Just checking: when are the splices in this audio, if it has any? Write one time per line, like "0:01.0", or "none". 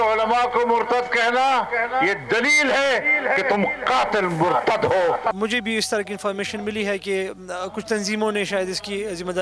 0:05.4